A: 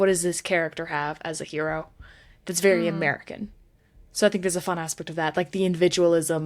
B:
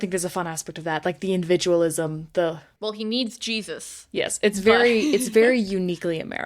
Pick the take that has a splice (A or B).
B